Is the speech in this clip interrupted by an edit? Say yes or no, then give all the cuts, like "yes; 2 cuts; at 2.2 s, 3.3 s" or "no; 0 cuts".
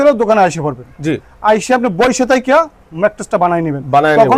no; 0 cuts